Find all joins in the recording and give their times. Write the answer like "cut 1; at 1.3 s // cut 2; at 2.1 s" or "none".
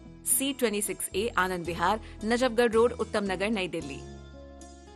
none